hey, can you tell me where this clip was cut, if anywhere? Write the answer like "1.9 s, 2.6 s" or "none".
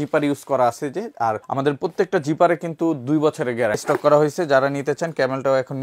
1.4 s, 3.8 s